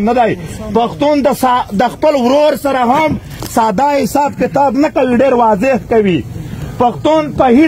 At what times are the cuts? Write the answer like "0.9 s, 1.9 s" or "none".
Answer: none